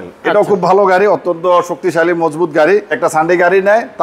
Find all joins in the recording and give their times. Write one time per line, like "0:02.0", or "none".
0:03.0